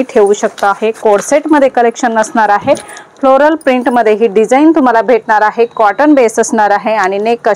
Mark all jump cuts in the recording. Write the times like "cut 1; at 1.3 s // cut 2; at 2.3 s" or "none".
none